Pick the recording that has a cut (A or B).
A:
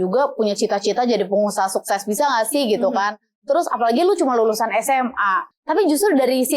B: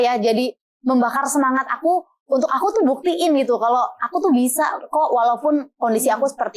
A